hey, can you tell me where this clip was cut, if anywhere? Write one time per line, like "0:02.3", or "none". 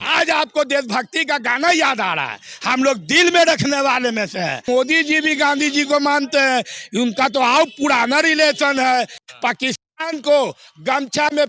0:04.7
0:09.2